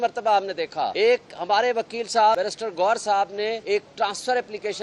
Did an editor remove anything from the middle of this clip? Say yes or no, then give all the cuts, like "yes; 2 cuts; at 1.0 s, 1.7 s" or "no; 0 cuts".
yes; 3 cuts; at 0.9 s, 2.4 s, 3.6 s